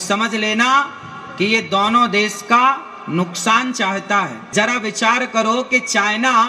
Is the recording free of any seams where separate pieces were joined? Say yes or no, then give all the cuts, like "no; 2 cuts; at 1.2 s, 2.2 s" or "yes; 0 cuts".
no; 1 cut; at 4.4 s